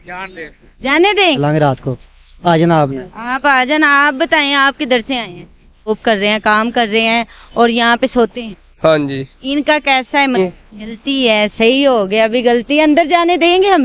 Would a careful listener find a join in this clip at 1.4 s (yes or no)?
yes